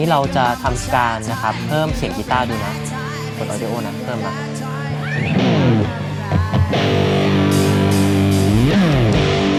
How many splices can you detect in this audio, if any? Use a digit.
0